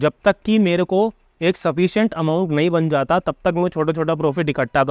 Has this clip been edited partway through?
no; 0 cuts

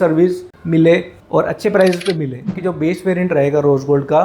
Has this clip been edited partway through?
yes; 1 cut; at 2.6 s

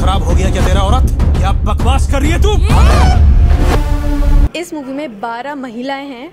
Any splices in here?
yes; 1 cut; at 4.5 s

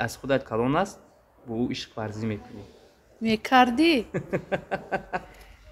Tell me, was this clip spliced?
no; 0 cuts

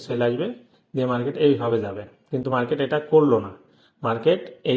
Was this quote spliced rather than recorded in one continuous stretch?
no; 0 cuts

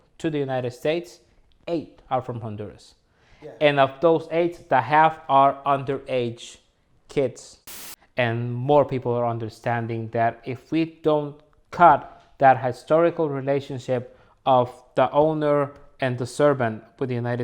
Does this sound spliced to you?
yes; 1 cut; at 7.7 s

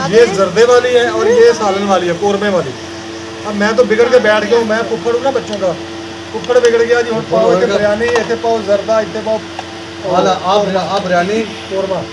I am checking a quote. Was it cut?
no; 0 cuts

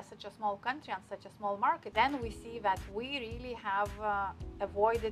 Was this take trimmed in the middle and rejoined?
yes; 1 cut; at 1.9 s

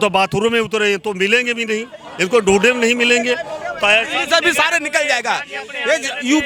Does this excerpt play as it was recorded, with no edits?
yes; 0 cuts

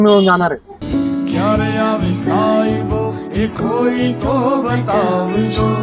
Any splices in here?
no; 0 cuts

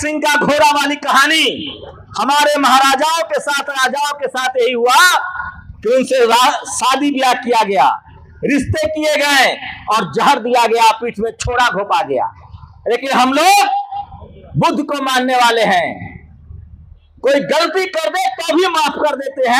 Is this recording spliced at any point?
no; 0 cuts

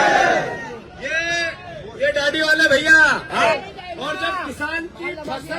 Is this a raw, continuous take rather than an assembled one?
no; 1 cut; at 3.4 s

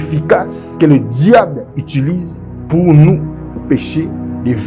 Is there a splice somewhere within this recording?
no; 0 cuts

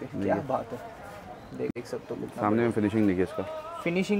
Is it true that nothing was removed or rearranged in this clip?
no; 1 cut; at 1.7 s

